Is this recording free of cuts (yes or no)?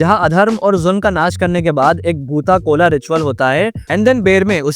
no